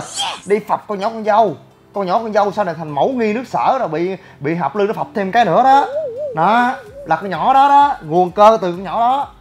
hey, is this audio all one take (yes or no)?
yes